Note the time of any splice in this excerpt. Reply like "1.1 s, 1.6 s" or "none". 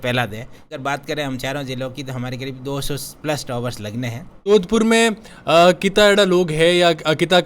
0.8 s, 4.5 s